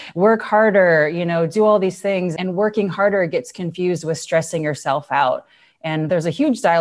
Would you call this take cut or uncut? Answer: cut